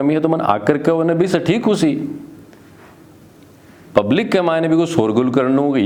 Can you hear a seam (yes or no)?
no